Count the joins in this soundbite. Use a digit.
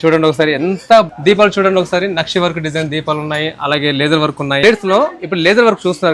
2